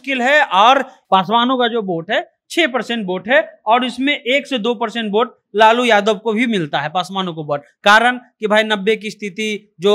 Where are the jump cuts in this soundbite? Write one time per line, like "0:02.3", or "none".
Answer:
0:00.9